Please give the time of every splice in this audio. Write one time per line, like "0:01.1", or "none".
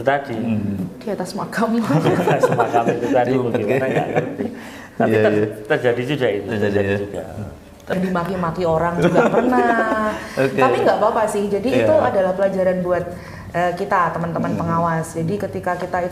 0:07.9